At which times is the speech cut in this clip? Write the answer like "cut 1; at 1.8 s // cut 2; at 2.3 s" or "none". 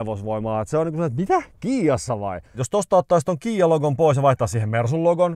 cut 1; at 2.6 s